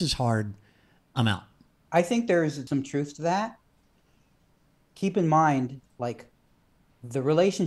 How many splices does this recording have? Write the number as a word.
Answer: two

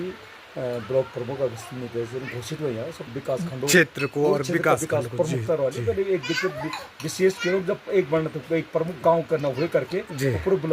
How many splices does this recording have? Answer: one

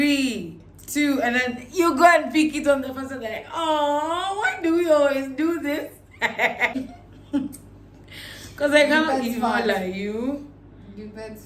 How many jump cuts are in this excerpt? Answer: one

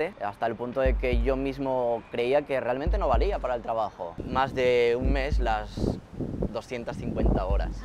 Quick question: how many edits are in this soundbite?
one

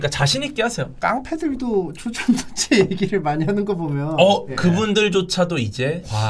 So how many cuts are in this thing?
two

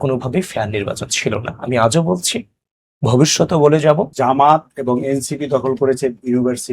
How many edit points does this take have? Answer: one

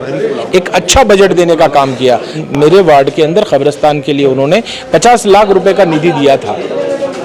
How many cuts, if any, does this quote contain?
one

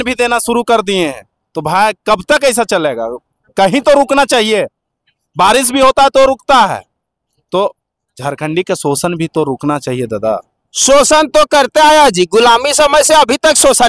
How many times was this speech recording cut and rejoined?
zero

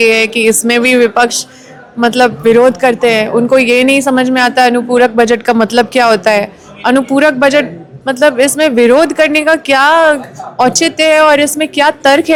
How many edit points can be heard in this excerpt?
zero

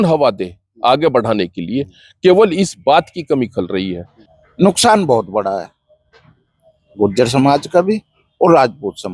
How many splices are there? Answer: one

